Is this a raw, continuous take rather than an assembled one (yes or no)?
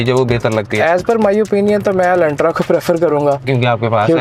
yes